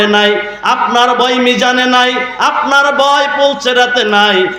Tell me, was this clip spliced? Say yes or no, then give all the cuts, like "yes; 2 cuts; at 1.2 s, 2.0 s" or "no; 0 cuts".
no; 0 cuts